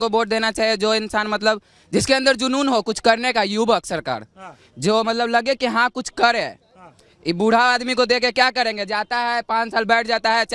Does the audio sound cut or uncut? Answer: uncut